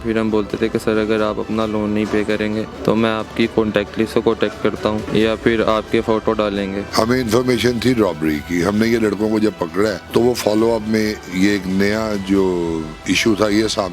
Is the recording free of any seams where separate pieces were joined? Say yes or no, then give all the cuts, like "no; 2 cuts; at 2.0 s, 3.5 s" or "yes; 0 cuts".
no; 4 cuts; at 2.7 s, 5.1 s, 6.8 s, 10.0 s